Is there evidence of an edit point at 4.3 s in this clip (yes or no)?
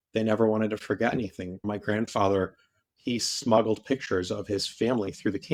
no